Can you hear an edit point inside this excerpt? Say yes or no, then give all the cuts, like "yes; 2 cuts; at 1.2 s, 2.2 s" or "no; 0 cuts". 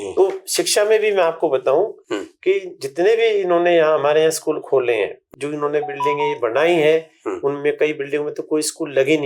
yes; 1 cut; at 5.3 s